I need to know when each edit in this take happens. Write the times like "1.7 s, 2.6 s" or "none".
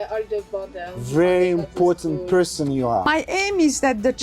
0.9 s, 3.1 s

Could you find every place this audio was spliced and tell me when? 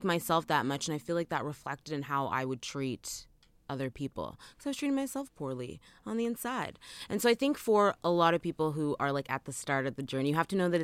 none

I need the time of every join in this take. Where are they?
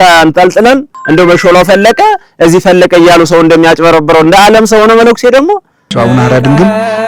0.9 s, 5.9 s

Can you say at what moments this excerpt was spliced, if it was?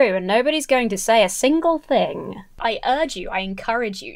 2.5 s

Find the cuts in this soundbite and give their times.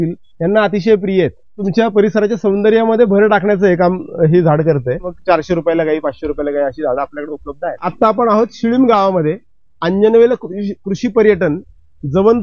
1.6 s, 5.1 s, 7.9 s

